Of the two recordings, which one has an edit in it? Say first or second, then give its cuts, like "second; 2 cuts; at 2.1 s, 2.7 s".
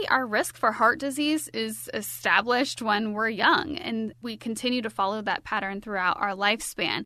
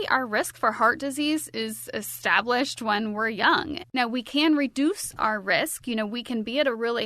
second; 1 cut; at 3.8 s